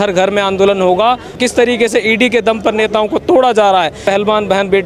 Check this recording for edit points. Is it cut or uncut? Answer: cut